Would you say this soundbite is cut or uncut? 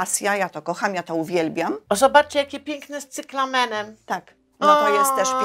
cut